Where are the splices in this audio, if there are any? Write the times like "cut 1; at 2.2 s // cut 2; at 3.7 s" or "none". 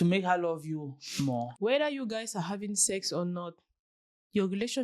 cut 1; at 1.5 s